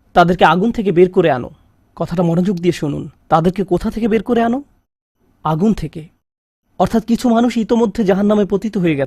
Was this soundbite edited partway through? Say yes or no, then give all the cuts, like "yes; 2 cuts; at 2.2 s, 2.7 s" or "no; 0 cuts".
no; 0 cuts